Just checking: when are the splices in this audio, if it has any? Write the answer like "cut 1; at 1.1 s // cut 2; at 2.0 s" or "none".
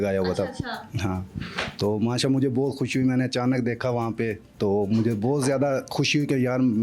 none